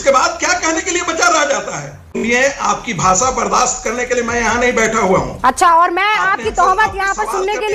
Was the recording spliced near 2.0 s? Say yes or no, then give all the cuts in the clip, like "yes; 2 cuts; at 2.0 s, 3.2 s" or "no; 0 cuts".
yes; 1 cut; at 2.0 s